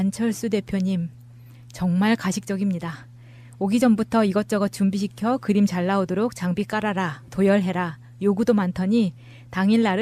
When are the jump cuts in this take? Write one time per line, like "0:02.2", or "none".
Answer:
0:06.2

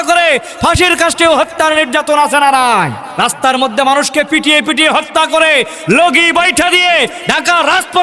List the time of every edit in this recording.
0:03.0

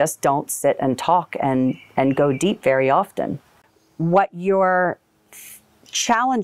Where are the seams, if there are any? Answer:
0:03.5

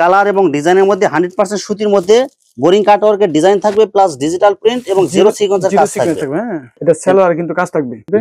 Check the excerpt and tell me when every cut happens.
none

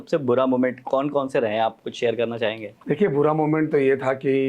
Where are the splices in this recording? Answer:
0:02.7

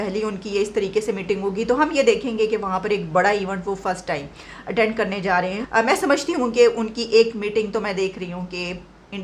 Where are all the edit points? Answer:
0:05.6

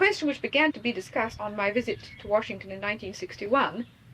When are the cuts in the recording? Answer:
0:00.9

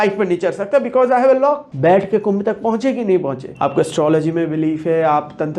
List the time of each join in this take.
0:01.7
0:03.4

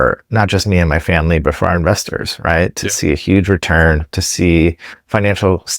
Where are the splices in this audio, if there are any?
none

